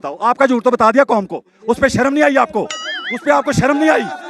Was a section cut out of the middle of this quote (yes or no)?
no